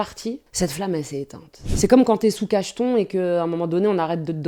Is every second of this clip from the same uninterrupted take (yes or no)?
yes